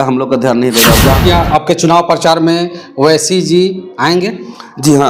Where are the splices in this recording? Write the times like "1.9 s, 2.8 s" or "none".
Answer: 1.2 s